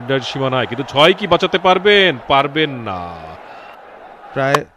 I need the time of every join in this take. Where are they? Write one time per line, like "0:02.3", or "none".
0:03.7